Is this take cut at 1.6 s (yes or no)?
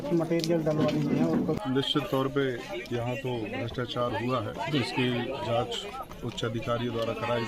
yes